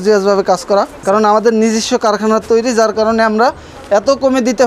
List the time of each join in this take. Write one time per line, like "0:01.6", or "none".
0:01.0